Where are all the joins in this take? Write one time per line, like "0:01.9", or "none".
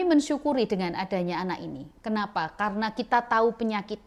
none